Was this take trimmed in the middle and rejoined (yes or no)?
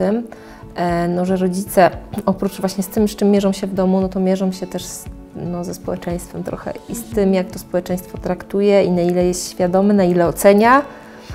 no